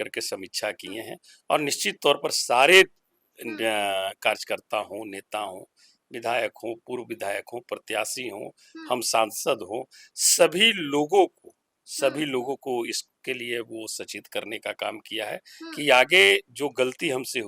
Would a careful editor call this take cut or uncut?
uncut